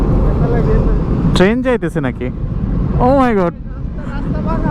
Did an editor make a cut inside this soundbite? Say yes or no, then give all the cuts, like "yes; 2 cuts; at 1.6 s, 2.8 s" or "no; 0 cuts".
no; 0 cuts